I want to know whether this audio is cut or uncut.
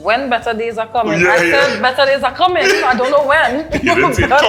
uncut